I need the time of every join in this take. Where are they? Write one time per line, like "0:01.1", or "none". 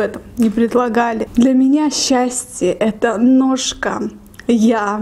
0:01.2